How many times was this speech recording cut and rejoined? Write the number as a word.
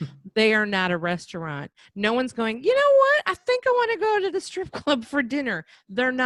zero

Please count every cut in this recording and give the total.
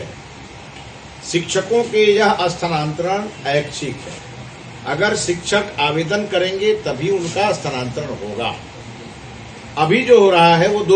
zero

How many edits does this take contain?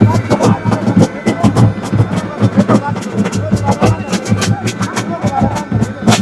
zero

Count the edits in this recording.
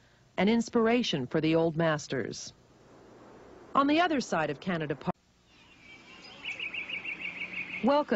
zero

